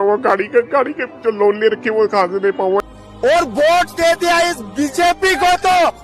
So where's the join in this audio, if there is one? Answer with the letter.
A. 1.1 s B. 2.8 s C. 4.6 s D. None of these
B